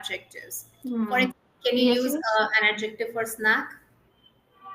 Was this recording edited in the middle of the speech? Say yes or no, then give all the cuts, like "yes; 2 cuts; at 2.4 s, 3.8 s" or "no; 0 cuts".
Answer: yes; 1 cut; at 1.3 s